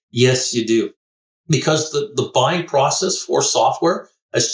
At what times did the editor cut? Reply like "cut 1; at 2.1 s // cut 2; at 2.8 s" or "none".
cut 1; at 1.0 s